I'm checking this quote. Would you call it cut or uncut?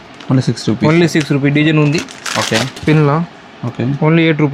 uncut